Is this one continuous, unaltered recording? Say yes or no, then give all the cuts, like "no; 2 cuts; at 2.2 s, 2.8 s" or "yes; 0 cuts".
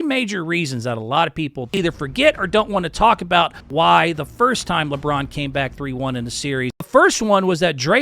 no; 3 cuts; at 1.7 s, 3.6 s, 6.9 s